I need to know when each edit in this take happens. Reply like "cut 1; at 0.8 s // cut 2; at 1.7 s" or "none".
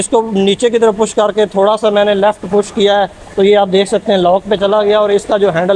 none